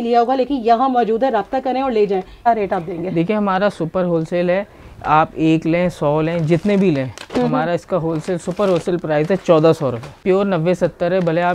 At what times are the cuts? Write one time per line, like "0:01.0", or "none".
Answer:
0:02.5
0:10.2

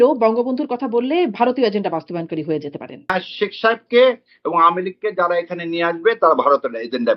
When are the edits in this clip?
0:03.1

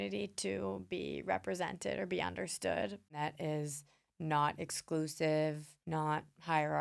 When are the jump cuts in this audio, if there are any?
0:03.0
0:05.7

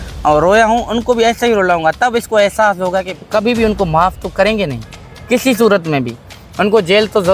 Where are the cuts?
0:03.1

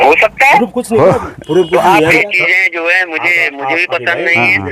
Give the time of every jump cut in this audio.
0:02.2

